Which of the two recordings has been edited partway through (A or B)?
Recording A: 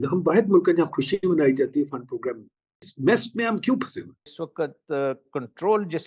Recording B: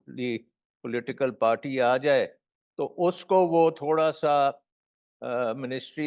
A